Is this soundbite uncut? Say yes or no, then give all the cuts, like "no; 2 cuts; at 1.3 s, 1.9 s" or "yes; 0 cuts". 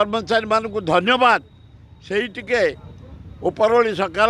yes; 0 cuts